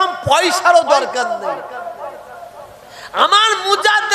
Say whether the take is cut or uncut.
uncut